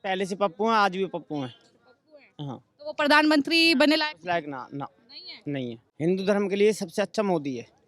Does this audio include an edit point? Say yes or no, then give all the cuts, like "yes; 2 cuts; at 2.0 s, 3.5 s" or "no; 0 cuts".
yes; 1 cut; at 5.8 s